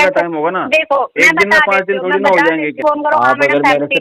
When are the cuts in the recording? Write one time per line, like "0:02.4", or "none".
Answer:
0:02.8